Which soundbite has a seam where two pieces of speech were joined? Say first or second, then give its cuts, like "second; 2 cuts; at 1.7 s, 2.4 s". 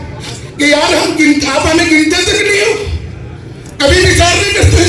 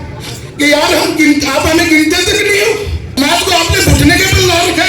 second; 1 cut; at 3.0 s